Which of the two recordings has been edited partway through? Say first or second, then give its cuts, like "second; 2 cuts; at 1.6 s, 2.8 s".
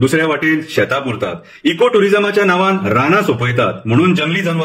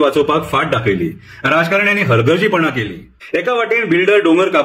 second; 1 cut; at 3.2 s